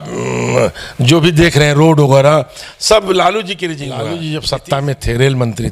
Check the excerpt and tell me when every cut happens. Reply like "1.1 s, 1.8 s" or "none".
3.9 s